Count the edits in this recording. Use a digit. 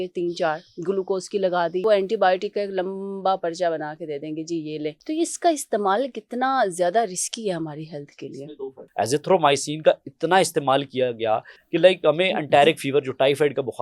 3